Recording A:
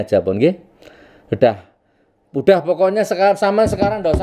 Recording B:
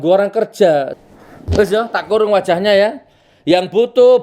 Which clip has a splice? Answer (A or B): B